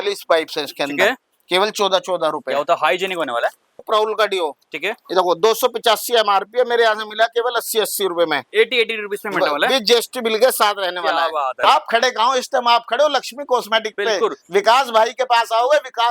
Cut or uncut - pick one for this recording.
cut